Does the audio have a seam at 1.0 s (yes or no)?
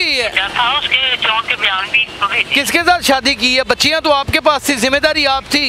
no